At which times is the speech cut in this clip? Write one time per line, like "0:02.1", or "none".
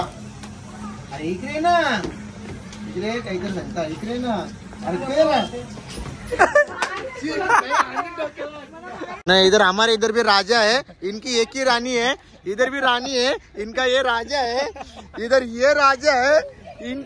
0:09.2